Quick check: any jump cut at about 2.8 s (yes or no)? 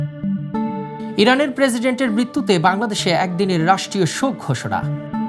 no